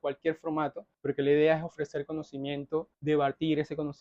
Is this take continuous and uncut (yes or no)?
no